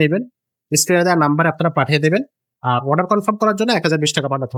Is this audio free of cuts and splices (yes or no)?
yes